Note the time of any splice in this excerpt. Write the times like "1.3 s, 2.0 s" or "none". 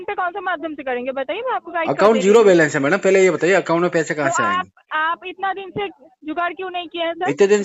none